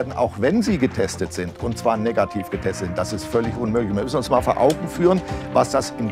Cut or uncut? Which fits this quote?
uncut